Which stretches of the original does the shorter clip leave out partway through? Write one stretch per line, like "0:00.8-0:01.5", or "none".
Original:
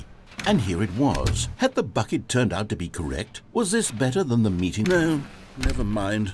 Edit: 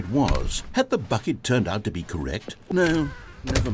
0:03.5-0:04.8